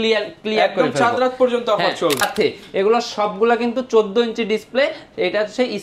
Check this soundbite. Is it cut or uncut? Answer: cut